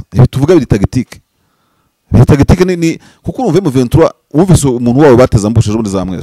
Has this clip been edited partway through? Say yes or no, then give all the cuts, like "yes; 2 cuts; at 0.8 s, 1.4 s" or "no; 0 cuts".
no; 0 cuts